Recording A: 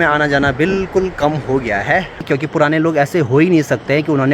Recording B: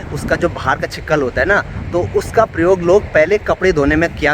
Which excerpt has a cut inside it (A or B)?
A